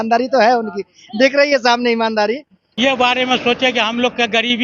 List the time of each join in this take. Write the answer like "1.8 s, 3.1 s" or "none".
2.7 s